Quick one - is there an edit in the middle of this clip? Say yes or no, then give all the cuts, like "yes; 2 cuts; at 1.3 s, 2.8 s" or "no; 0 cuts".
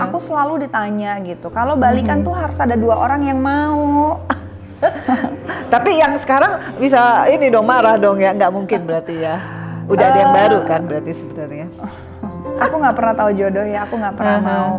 yes; 1 cut; at 12.6 s